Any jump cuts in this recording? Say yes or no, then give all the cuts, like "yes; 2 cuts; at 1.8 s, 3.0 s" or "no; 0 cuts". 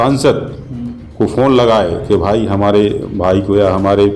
no; 0 cuts